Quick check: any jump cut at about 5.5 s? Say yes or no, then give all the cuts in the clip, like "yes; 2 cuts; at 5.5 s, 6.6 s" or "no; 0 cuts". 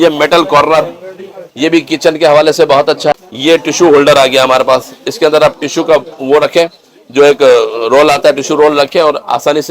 no; 1 cut; at 3.1 s